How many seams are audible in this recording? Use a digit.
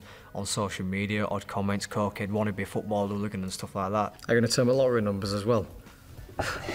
1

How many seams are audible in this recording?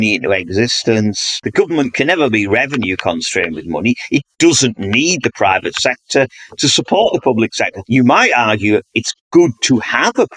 2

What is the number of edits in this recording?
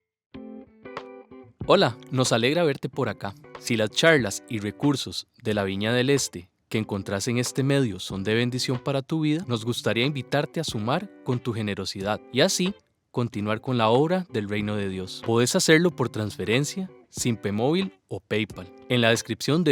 1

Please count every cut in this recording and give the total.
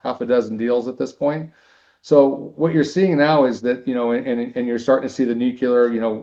0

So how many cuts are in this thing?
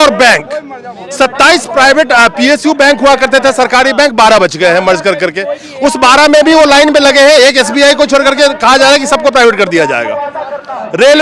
0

